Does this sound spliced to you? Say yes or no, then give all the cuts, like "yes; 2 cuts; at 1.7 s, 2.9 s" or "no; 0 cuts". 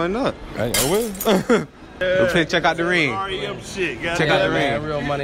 yes; 1 cut; at 1.8 s